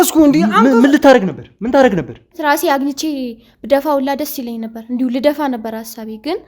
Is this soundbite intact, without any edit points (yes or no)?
no